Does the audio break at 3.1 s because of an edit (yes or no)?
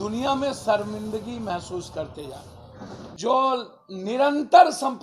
yes